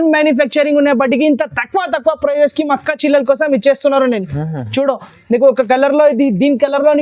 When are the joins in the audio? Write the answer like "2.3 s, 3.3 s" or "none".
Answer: none